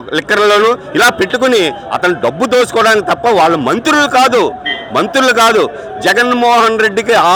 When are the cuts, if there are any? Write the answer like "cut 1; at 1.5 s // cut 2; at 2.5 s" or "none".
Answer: none